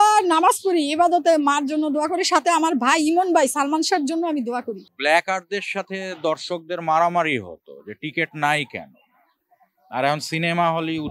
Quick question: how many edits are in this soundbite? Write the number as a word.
one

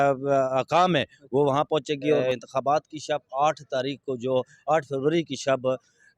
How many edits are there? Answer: one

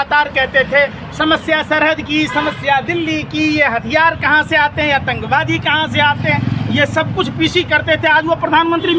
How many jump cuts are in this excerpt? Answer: zero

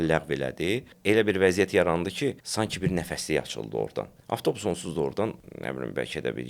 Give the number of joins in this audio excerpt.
four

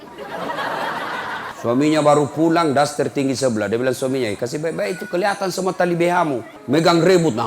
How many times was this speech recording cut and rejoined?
two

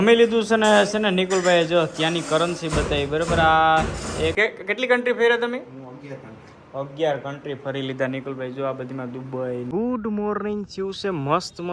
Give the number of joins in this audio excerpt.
two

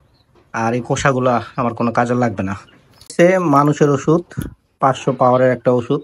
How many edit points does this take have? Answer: one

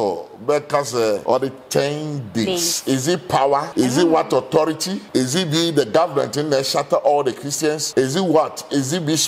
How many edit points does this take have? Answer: four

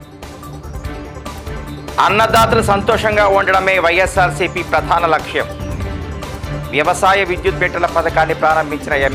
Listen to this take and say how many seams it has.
one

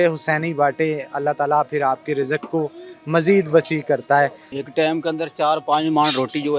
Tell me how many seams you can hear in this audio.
one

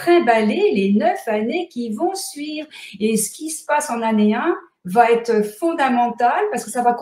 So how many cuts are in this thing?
zero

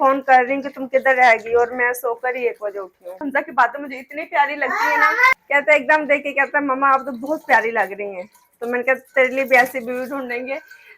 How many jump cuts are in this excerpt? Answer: two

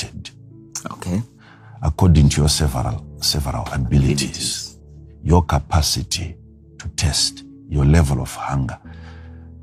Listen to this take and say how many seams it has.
zero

